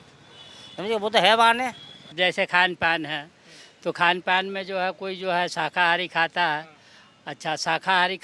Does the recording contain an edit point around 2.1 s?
yes; 1 cut; at 2.1 s

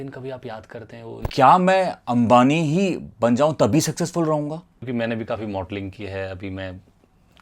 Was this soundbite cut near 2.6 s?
no; 2 cuts; at 1.3 s, 4.9 s

